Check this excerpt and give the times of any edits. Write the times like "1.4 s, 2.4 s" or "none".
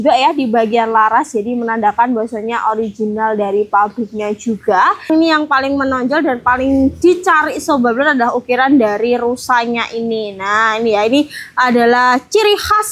5.1 s